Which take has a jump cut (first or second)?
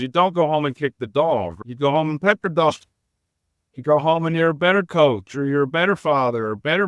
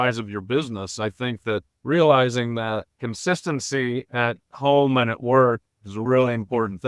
first